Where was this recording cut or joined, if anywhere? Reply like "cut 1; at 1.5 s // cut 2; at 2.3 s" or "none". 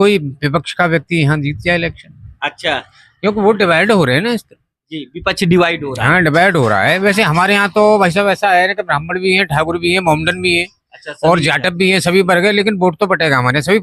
none